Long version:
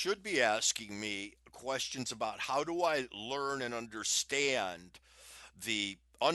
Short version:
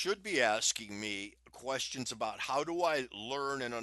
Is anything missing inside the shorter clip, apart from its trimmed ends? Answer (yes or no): no